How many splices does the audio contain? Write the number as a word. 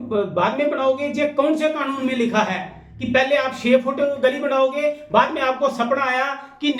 zero